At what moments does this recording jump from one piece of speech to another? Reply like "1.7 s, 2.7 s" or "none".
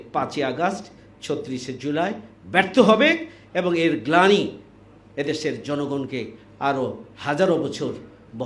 none